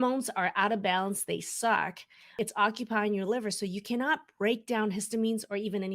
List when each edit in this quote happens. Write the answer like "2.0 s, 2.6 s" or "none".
2.3 s